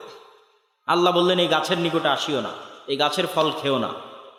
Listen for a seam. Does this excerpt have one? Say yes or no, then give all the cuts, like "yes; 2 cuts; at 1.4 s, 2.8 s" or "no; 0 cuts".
no; 0 cuts